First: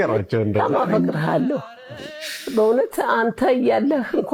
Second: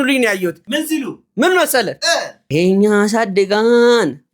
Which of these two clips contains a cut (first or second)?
second